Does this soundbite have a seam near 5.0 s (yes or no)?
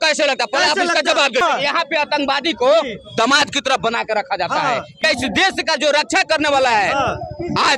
yes